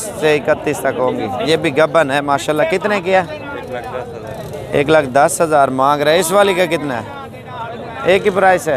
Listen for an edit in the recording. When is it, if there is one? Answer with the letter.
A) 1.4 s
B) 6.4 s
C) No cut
A